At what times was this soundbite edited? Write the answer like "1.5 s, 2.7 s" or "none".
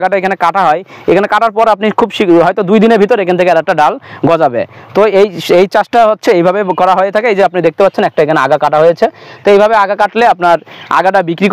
none